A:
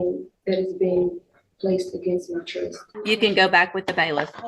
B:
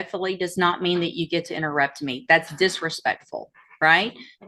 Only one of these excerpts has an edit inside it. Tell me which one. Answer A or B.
A